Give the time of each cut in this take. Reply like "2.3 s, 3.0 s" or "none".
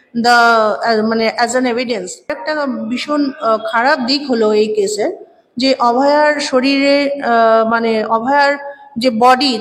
2.4 s

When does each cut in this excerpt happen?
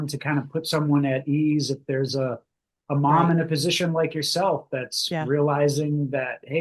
none

